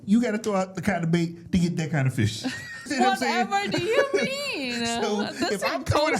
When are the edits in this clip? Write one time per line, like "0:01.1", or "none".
0:02.9